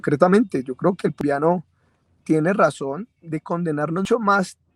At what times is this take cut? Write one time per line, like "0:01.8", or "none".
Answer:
0:01.2
0:04.1

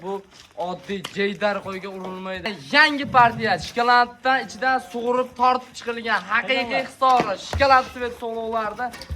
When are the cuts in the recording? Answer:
0:02.6

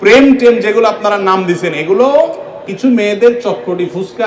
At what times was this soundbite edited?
none

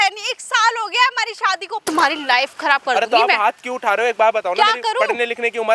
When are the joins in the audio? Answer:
0:01.8

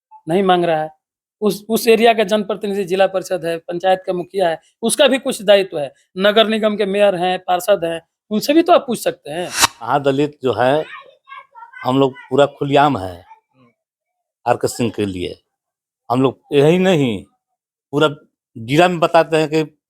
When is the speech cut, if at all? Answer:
0:09.9

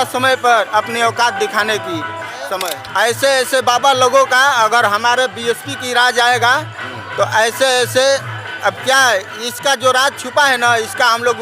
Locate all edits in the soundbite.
0:02.5

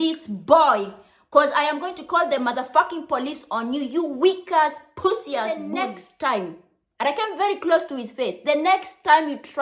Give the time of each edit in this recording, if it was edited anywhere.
0:05.7

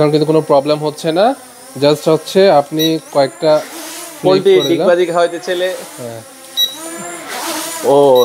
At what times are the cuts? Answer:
none

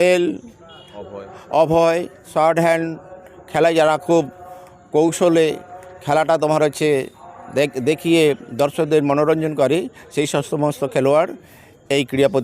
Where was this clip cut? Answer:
0:02.2

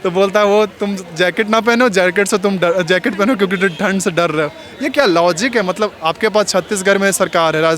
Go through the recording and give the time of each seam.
none

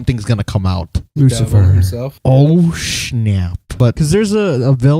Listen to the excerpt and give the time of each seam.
0:03.7

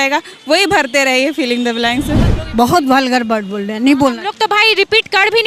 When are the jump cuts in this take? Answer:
0:02.3

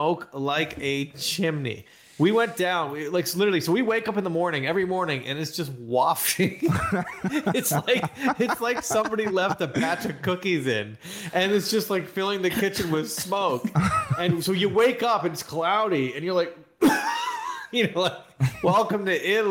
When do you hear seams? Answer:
none

